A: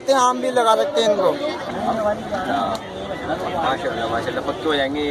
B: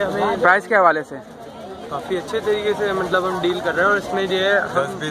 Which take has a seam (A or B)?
A